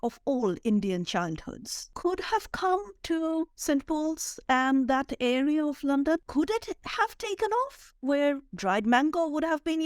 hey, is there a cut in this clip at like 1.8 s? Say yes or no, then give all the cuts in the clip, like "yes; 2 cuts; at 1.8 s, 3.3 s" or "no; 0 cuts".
yes; 2 cuts; at 1.8 s, 6.2 s